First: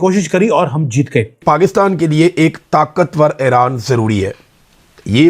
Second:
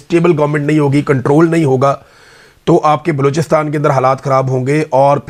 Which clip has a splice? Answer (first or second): first